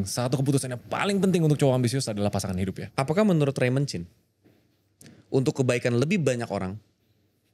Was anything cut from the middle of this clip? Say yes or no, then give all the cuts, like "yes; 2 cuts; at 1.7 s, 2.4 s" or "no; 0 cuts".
yes; 1 cut; at 2.8 s